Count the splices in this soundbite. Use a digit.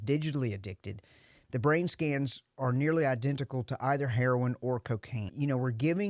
1